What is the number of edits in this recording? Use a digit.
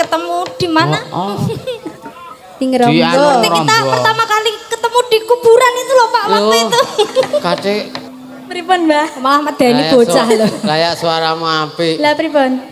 1